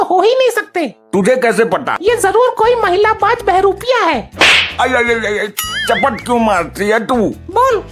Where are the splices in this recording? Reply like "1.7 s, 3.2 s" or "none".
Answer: 1.9 s

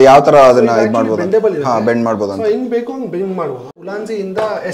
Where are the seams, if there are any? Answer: 3.8 s

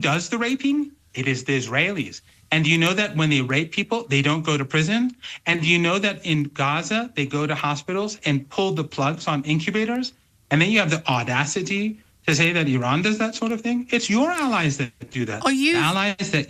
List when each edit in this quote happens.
none

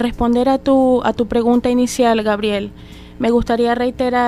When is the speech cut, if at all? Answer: 2.4 s

